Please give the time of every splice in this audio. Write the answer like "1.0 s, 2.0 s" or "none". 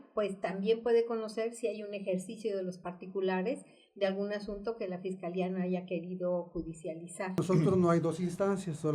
7.4 s